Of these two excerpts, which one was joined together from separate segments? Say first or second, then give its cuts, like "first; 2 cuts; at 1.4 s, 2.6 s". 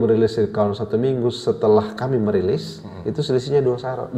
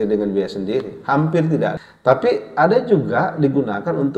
second; 1 cut; at 1.8 s